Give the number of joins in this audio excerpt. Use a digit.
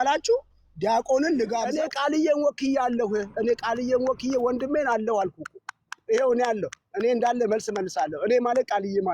1